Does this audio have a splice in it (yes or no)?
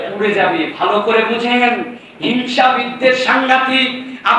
no